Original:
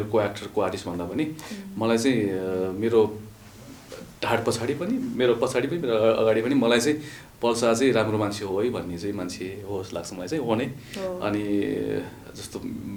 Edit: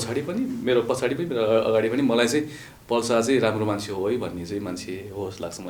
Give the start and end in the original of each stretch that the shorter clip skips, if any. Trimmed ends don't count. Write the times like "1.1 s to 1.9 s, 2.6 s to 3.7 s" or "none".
none